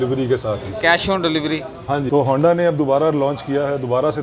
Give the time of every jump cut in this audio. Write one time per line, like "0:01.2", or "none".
0:02.1